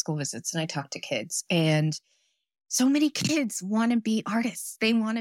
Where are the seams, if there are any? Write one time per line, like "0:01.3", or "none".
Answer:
none